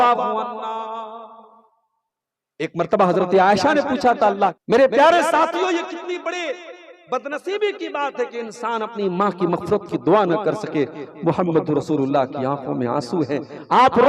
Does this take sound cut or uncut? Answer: cut